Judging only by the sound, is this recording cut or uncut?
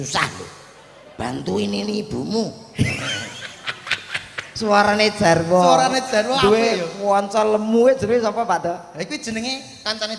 uncut